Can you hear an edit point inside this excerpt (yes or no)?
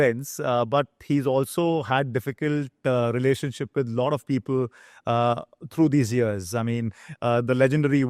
no